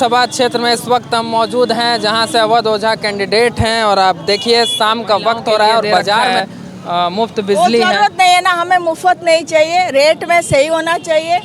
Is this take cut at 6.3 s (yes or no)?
yes